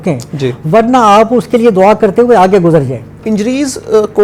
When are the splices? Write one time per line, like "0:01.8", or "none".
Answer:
0:03.1